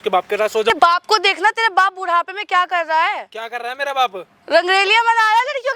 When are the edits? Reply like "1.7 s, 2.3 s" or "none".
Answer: none